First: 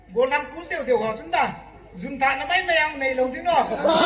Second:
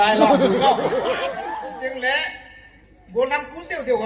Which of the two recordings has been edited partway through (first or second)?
second